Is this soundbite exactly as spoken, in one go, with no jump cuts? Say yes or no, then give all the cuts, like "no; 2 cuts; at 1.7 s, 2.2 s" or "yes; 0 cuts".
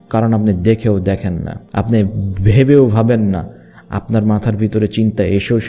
no; 1 cut; at 1.5 s